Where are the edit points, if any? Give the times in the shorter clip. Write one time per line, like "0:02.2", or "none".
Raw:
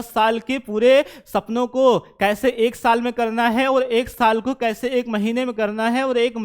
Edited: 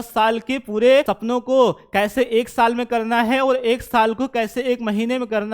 0:01.1